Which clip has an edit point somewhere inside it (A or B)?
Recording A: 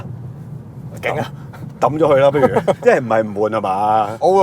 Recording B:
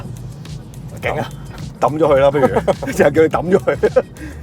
A